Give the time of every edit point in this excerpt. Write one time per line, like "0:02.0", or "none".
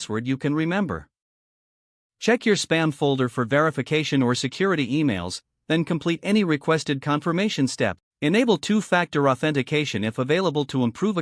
0:08.1